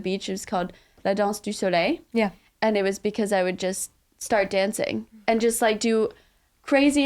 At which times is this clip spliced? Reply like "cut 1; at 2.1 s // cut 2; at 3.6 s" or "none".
cut 1; at 1.0 s // cut 2; at 2.4 s

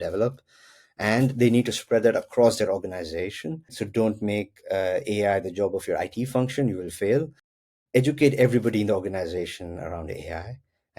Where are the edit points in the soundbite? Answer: cut 1; at 3.8 s

